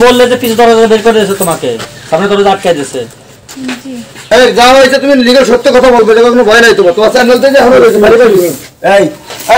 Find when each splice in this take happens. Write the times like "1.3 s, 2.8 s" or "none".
4.1 s